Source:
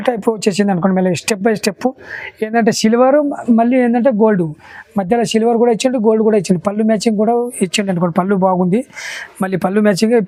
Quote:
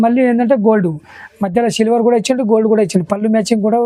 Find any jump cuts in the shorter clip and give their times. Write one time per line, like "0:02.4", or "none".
none